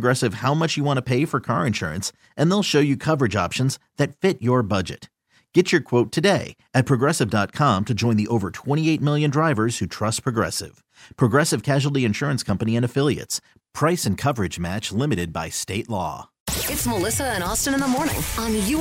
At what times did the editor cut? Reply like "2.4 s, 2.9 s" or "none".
16.5 s